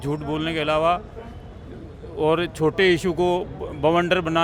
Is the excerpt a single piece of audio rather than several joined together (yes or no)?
yes